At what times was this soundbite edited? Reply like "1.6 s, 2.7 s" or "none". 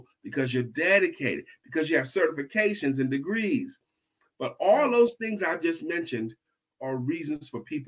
4.2 s, 6.7 s